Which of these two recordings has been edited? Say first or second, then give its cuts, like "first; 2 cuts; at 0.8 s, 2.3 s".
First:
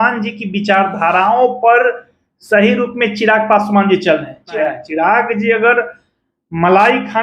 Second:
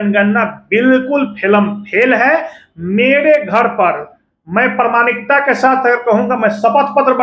first; 1 cut; at 4.6 s